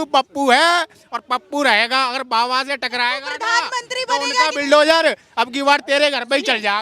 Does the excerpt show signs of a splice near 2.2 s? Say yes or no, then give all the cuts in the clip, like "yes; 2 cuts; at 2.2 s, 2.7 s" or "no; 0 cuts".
no; 0 cuts